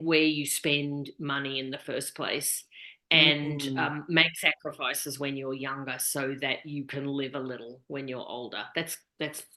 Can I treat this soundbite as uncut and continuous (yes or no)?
yes